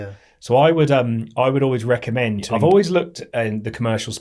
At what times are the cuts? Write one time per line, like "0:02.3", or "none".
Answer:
0:02.4